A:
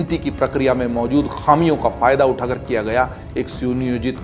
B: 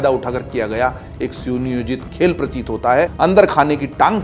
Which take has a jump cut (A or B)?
B